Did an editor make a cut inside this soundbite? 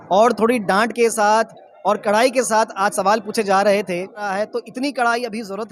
yes; 1 cut; at 4.2 s

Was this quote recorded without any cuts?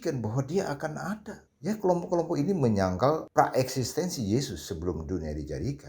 no; 1 cut; at 1.4 s

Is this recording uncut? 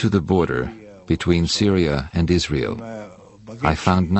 no; 1 cut; at 2.9 s

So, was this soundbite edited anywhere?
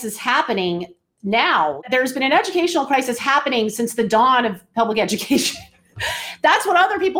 yes; 1 cut; at 1.8 s

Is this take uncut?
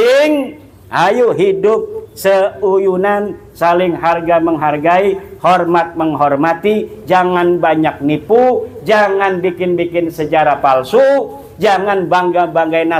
yes; 0 cuts

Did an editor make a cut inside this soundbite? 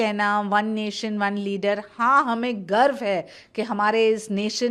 no; 0 cuts

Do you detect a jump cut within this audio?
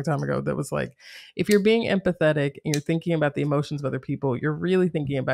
no; 0 cuts

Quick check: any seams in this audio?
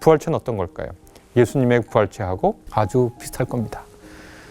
yes; 1 cut; at 2.6 s

